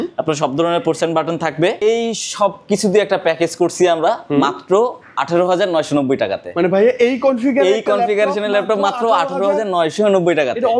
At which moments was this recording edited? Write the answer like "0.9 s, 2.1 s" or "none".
1.8 s